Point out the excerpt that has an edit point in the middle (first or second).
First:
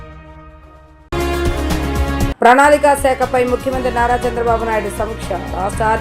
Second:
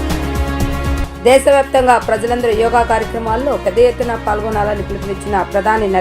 second